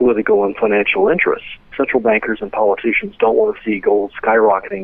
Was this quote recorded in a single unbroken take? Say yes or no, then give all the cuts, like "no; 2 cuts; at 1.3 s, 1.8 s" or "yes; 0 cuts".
no; 1 cut; at 1.6 s